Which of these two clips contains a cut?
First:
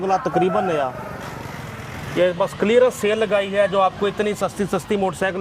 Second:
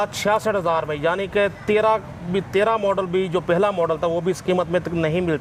first; 1 cut; at 2.0 s

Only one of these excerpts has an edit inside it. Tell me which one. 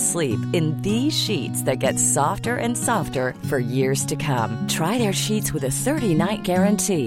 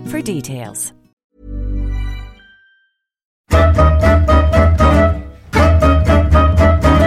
second; 2 cuts; at 1.1 s, 3.5 s

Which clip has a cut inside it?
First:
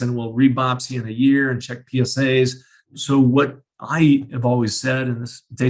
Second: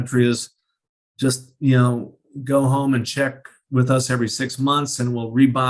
first; 1 cut; at 2.9 s

